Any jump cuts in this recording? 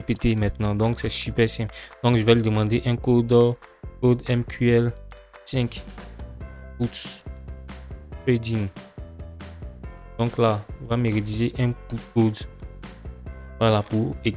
no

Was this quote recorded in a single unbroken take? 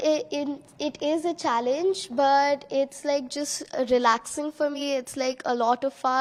yes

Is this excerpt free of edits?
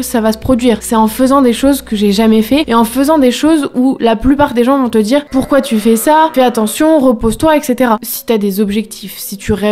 no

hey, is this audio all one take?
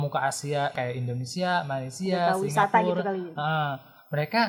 yes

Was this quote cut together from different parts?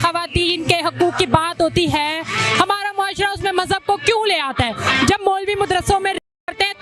no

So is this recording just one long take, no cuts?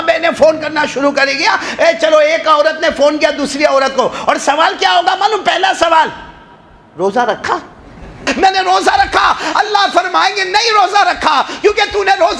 no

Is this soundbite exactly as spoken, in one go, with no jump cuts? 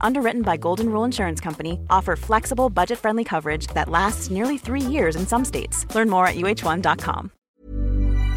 no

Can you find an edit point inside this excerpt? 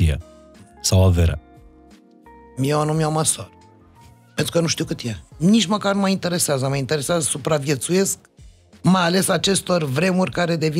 yes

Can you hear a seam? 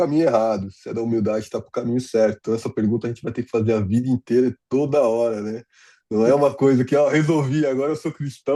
no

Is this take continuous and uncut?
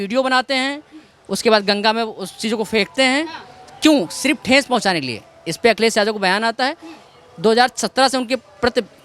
yes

